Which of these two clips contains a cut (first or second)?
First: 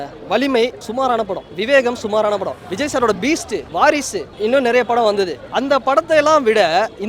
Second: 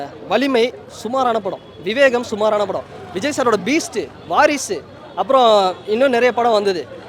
first